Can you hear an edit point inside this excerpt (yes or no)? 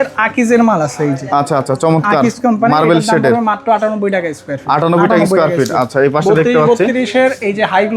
no